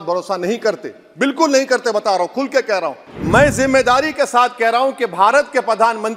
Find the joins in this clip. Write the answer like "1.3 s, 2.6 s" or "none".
3.1 s